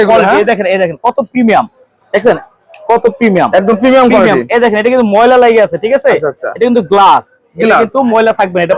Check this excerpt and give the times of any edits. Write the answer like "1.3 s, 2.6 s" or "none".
none